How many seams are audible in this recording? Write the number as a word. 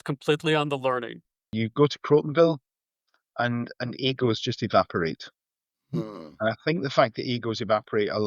one